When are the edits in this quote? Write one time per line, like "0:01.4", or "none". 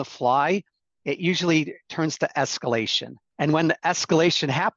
none